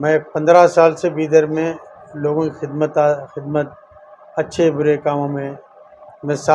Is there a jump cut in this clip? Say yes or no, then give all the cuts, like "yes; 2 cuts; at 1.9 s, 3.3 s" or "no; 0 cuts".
no; 0 cuts